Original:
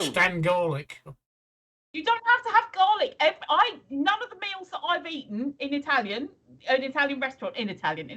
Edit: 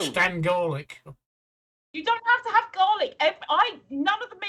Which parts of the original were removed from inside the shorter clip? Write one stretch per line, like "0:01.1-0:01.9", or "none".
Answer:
none